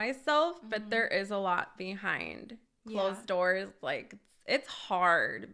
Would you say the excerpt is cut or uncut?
uncut